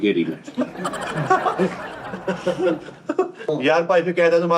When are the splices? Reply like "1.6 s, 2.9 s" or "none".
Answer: 3.5 s